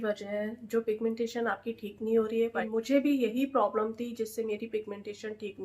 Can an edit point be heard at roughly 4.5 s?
no; 1 cut; at 2.6 s

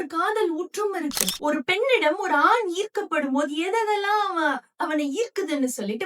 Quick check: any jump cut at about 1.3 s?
yes; 1 cut; at 1.3 s

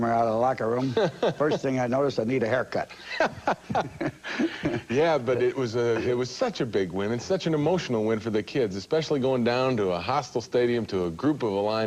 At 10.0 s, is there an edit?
no; 0 cuts

